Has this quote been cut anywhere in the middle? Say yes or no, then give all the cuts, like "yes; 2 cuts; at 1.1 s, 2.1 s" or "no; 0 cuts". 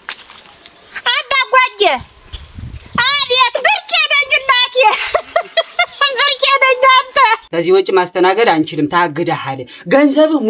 yes; 1 cut; at 7.4 s